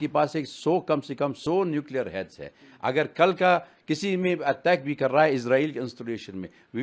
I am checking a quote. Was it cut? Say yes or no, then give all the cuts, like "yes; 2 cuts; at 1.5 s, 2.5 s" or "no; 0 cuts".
no; 0 cuts